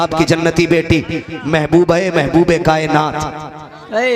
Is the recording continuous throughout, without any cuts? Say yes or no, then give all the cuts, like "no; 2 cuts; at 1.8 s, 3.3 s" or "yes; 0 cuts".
yes; 0 cuts